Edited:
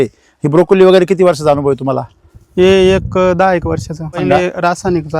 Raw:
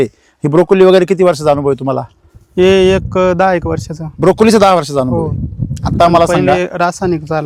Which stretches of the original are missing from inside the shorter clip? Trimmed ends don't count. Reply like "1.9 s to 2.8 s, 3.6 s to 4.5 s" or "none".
4.2 s to 6.3 s